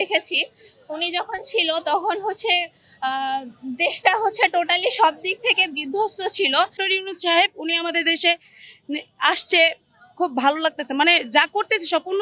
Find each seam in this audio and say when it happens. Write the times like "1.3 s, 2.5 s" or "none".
6.8 s